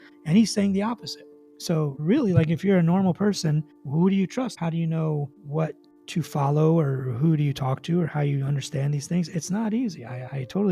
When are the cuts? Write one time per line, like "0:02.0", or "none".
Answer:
0:04.5